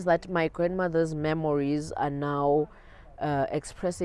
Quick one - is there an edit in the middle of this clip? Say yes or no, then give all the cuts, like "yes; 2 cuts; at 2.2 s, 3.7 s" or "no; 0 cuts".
no; 0 cuts